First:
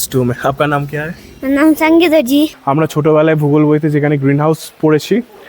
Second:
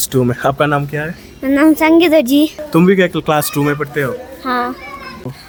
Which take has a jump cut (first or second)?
first